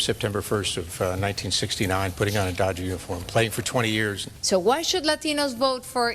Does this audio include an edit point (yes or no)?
yes